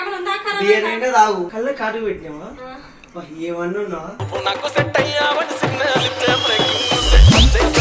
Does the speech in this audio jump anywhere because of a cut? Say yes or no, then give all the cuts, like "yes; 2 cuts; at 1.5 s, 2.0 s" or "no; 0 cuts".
yes; 1 cut; at 1.5 s